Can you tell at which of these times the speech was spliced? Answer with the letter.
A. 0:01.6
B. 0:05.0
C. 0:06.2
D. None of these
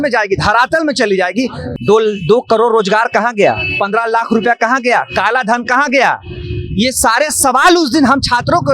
A